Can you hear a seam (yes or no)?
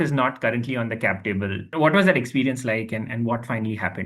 yes